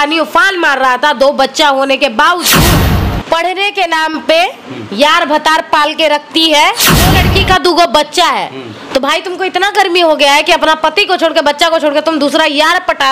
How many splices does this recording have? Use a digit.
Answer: 2